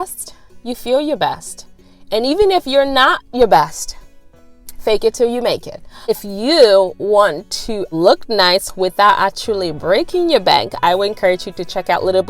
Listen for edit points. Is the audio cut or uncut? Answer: cut